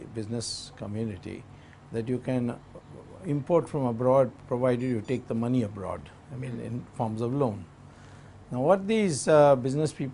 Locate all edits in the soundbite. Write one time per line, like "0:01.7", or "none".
0:01.1